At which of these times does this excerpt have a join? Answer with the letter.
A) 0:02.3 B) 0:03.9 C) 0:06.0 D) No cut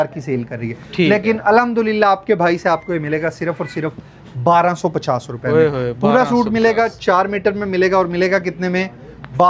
D